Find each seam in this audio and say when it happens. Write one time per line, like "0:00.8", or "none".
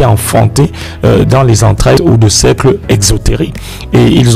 0:02.0